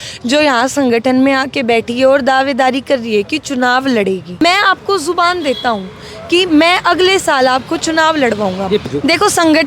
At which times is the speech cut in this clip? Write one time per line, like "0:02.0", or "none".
0:04.4
0:08.9